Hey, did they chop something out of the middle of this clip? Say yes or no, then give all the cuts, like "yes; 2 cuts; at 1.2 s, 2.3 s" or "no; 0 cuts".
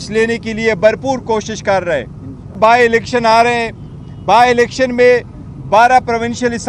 yes; 1 cut; at 2.6 s